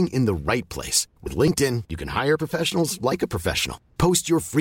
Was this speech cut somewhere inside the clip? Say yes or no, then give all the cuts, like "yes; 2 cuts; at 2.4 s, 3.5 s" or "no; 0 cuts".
no; 0 cuts